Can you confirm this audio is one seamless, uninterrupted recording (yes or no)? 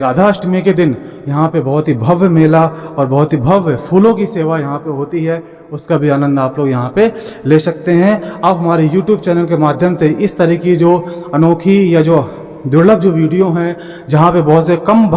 yes